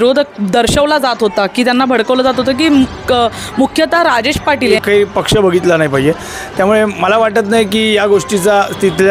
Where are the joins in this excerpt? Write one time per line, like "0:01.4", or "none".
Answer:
0:04.8